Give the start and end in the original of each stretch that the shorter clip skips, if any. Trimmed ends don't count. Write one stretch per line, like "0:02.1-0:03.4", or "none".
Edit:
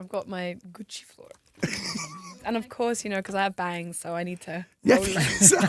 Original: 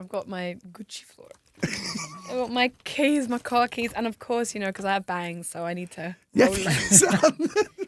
0:02.3-0:03.8